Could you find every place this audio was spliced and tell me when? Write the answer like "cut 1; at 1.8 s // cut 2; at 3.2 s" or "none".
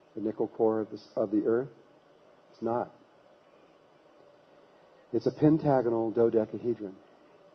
cut 1; at 3.4 s